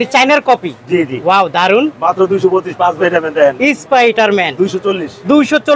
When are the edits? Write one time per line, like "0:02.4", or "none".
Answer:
0:03.0